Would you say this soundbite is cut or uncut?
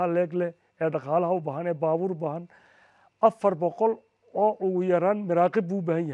uncut